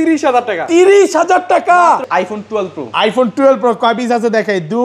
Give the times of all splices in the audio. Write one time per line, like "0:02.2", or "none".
0:02.1